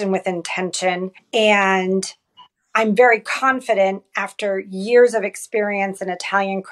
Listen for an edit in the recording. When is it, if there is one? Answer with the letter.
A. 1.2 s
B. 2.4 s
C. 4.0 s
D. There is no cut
A